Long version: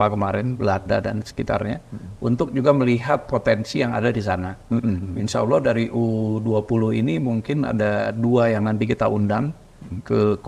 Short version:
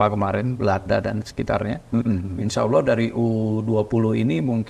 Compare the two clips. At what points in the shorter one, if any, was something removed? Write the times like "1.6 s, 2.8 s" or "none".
1.8 s